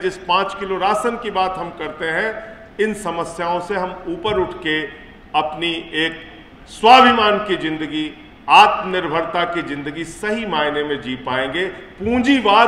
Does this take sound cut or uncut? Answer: uncut